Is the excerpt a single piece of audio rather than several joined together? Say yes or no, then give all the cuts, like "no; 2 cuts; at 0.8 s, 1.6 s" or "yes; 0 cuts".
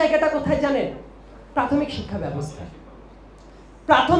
yes; 0 cuts